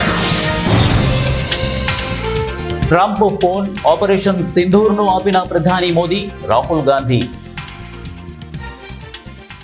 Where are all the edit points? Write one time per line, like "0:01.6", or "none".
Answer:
0:01.3
0:02.8
0:08.6